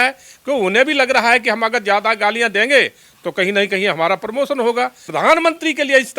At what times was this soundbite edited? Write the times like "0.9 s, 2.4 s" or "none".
5.1 s